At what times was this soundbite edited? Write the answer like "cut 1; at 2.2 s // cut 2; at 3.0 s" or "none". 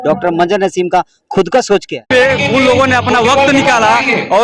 cut 1; at 2.1 s